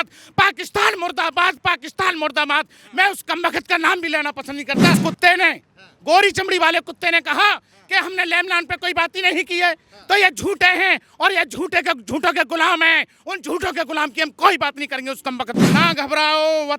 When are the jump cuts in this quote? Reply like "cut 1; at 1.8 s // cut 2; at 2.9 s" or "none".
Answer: cut 1; at 5.0 s // cut 2; at 15.6 s